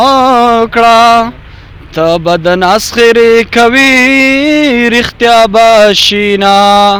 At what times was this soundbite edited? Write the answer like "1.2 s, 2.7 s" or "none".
none